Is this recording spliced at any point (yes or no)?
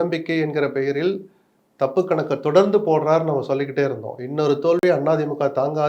no